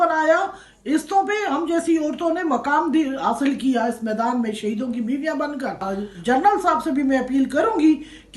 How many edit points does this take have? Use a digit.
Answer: 1